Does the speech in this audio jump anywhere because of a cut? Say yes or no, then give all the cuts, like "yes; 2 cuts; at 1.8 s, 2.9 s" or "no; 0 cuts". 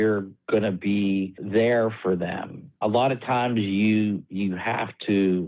no; 0 cuts